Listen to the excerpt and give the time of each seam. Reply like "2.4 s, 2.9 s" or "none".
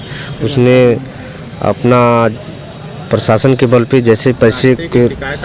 none